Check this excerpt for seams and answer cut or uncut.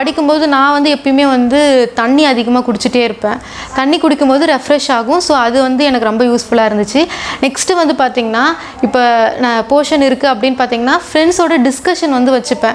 uncut